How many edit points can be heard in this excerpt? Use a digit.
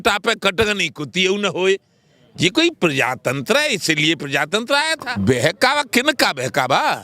1